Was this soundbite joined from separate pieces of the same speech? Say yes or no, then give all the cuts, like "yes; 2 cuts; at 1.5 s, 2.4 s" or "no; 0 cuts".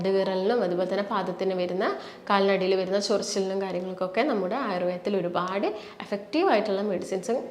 no; 0 cuts